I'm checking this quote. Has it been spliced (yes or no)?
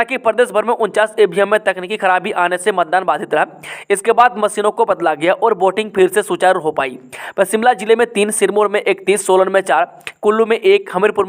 no